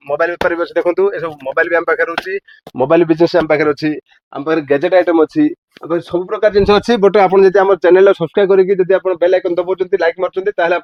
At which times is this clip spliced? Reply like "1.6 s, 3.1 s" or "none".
none